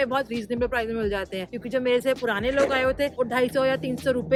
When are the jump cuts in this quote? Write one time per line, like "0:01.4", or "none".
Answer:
none